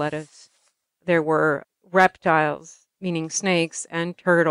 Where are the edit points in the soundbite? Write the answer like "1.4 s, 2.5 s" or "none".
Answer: 1.7 s, 2.8 s